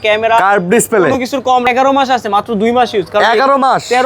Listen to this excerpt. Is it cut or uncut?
cut